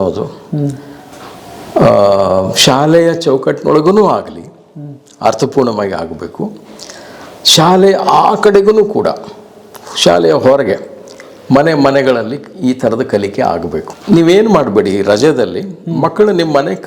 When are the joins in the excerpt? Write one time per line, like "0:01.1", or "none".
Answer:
0:13.9